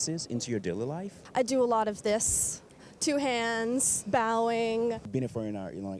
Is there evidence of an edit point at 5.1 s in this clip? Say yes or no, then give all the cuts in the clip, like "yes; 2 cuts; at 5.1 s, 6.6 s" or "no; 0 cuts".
yes; 3 cuts; at 1.2 s, 4.0 s, 5.1 s